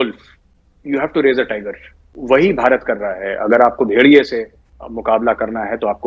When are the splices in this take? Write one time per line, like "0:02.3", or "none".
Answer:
none